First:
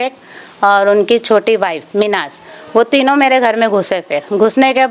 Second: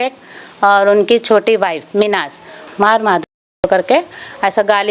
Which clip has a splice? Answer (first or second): second